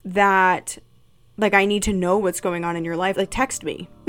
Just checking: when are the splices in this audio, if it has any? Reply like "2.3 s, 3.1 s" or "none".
3.1 s